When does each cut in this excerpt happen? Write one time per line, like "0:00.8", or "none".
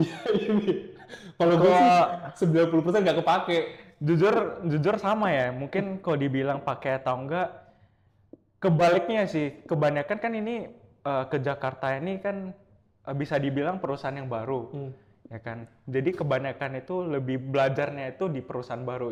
none